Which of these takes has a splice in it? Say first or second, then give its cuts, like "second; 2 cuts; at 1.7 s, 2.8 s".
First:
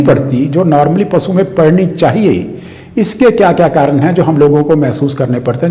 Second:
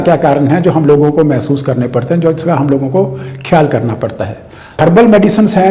second; 1 cut; at 4.8 s